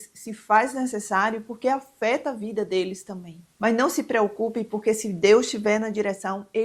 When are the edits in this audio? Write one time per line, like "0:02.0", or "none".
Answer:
none